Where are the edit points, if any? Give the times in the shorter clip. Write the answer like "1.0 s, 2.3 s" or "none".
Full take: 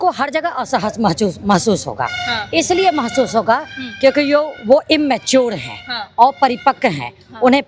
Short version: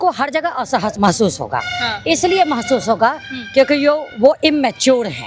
0.9 s